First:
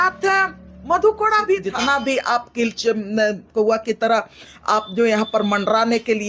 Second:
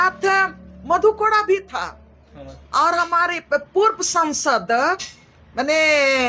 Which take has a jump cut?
first; 1 cut; at 1.7 s

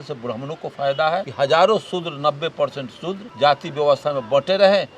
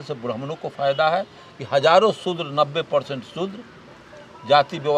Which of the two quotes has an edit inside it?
first; 2 cuts; at 1.3 s, 3.3 s

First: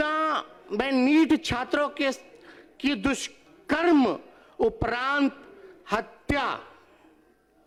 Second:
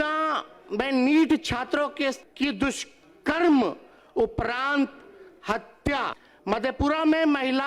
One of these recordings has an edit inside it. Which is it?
second; 2 cuts; at 2.3 s, 6.3 s

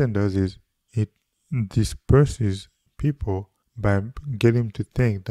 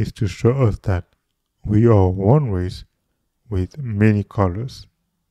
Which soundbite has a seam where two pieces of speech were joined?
first; 1 cut; at 3.6 s

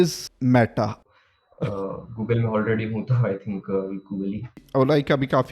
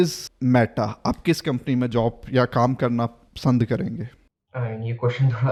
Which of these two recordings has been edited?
first; 2 cuts; at 1.0 s, 4.6 s

